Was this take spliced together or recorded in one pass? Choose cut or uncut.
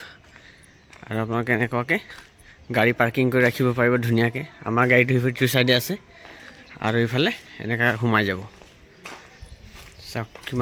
uncut